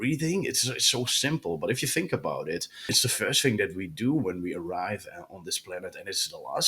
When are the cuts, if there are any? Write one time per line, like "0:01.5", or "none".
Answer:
0:02.9